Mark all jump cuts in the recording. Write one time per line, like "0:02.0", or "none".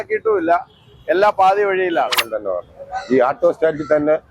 0:02.3

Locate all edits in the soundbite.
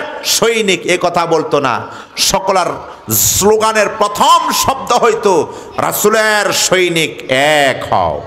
none

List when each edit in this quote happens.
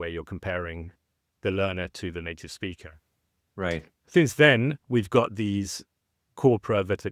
none

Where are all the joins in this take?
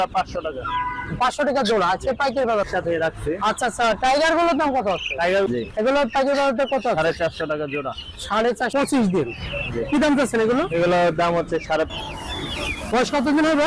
0:02.7
0:05.5
0:08.7
0:11.9

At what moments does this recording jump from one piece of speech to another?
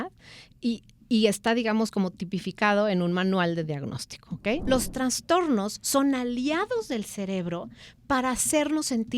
0:04.6

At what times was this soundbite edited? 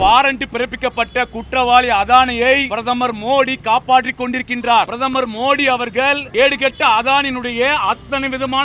0:02.7
0:04.9
0:06.2

